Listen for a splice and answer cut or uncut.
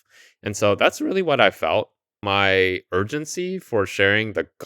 cut